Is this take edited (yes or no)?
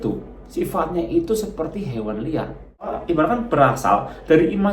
yes